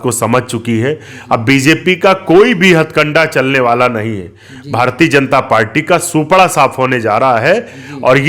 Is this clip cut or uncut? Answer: uncut